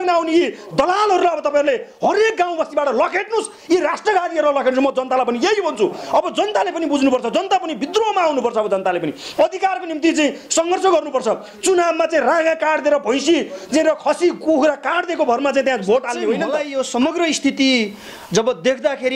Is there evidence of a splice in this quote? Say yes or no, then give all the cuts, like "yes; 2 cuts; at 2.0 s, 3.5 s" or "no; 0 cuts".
yes; 1 cut; at 16.6 s